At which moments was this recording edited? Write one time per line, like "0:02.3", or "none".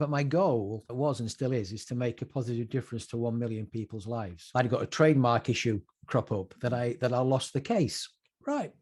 0:00.9
0:04.4